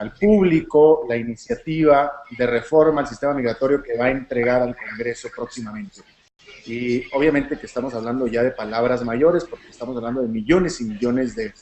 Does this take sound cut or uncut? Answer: cut